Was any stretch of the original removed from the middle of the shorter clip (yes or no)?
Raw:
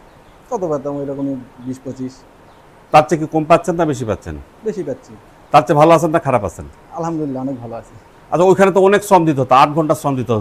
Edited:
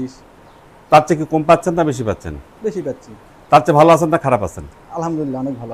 no